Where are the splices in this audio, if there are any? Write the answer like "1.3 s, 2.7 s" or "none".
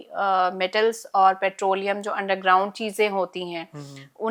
none

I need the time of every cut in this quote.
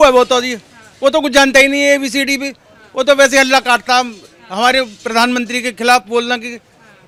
none

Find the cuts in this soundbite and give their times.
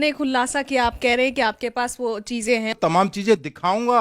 2.7 s

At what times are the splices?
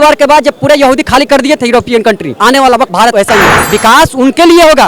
3.6 s

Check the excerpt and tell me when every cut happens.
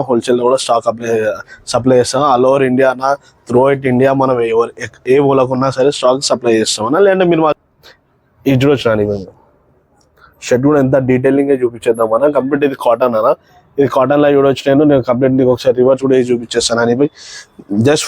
7.6 s

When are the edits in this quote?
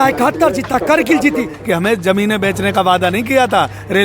1.6 s

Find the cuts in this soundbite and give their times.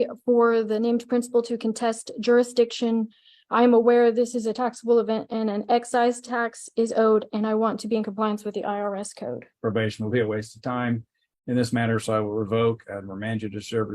9.5 s

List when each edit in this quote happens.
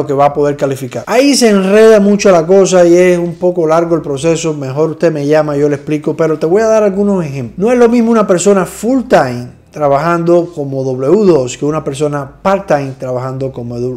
none

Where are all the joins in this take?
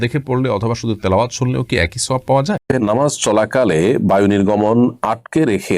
2.8 s

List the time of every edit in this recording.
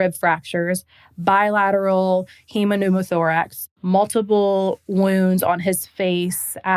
3.6 s

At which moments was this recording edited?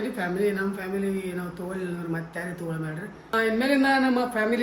3.3 s

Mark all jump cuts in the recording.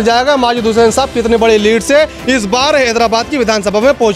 none

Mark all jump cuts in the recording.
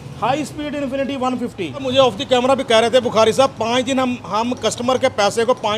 1.9 s

